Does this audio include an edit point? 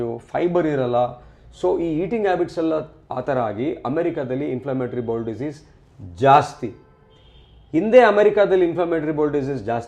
no; 0 cuts

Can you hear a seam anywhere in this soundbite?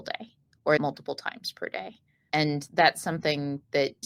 no; 0 cuts

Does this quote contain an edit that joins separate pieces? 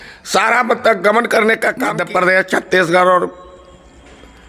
yes; 1 cut; at 2.0 s

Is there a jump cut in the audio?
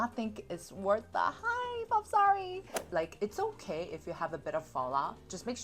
yes; 1 cut; at 2.7 s

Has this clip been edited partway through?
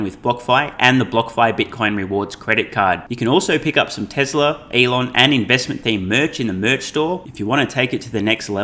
no; 0 cuts

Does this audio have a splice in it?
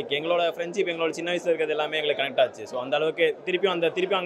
no; 0 cuts

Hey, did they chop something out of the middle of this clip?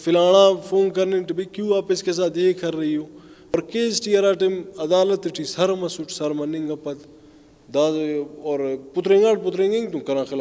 yes; 1 cut; at 3.5 s

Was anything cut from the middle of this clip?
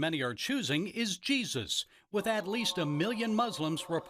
no; 0 cuts

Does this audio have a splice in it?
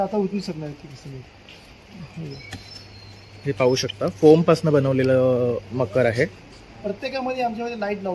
no; 0 cuts

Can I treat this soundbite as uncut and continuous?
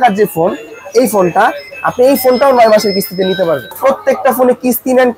no; 1 cut; at 3.7 s

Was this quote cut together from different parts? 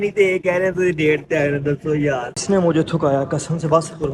yes; 1 cut; at 2.4 s

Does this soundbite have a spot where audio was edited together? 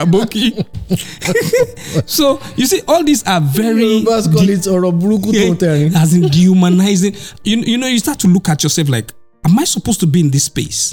no; 0 cuts

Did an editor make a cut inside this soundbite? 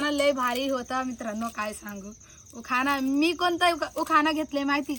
no; 0 cuts

